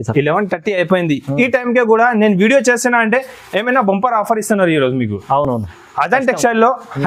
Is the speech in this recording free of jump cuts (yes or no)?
yes